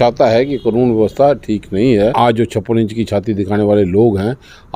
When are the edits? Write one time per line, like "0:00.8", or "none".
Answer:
0:02.1